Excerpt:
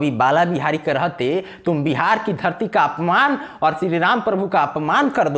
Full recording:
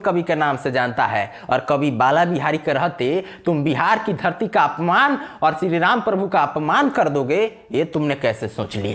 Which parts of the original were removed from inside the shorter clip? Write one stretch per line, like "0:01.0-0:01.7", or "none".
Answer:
none

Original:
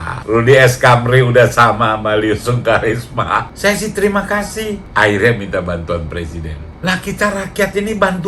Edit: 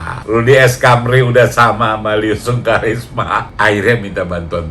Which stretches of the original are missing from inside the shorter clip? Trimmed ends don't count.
0:03.5-0:04.9

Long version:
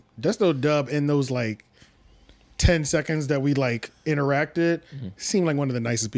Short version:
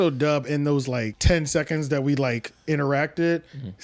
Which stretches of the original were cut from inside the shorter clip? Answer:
0:01.6-0:02.5

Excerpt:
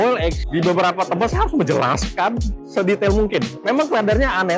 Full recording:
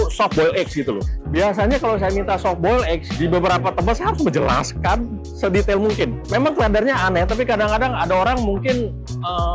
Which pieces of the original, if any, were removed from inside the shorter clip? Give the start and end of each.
none

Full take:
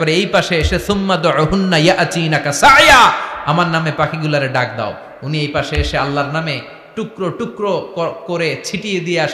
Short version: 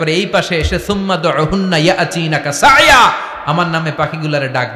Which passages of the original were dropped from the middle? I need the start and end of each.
none

